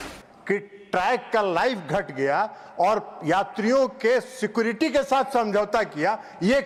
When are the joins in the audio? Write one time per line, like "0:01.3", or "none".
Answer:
none